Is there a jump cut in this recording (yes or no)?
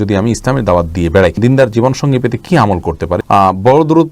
yes